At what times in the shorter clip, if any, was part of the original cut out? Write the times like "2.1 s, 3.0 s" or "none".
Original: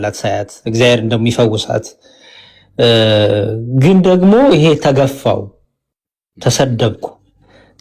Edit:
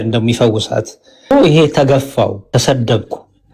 1.3 s, 2.4 s

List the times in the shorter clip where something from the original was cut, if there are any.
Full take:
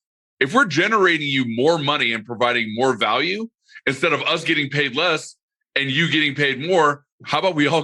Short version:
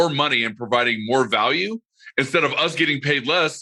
none

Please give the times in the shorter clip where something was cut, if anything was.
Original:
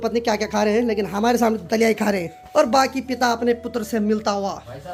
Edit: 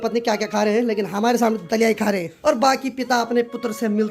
2.3 s

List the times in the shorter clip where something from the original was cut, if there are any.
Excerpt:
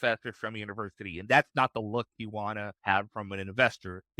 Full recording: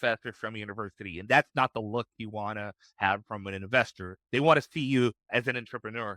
2.7 s

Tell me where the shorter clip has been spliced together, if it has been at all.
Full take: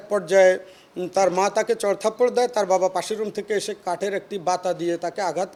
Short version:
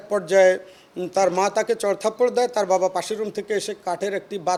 none

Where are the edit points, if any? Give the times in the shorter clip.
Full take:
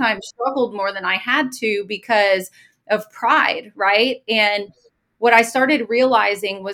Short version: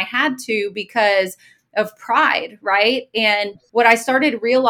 3.6 s

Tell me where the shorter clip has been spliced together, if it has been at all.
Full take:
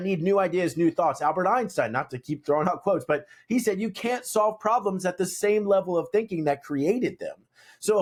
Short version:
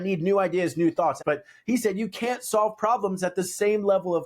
1.2 s

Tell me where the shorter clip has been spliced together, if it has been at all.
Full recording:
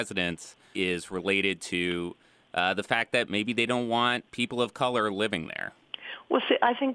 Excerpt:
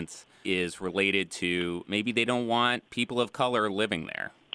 1.9 s

